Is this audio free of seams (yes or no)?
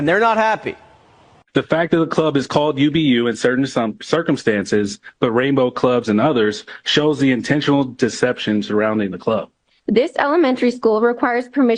yes